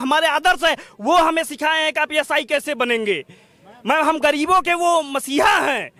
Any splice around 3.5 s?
no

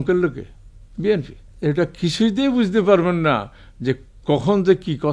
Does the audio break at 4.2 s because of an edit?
no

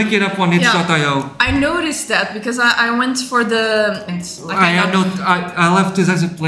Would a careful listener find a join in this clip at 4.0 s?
yes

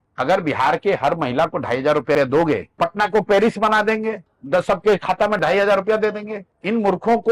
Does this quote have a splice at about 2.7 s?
yes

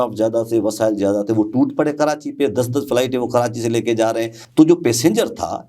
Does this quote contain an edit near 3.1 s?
no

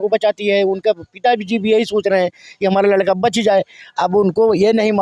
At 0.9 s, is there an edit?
no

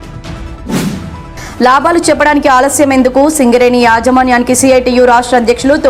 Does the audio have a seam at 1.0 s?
yes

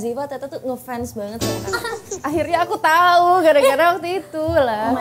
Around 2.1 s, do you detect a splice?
yes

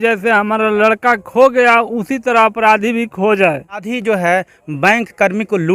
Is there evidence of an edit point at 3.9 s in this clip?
yes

